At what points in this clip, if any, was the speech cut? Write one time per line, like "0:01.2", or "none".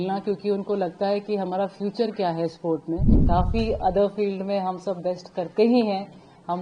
0:03.1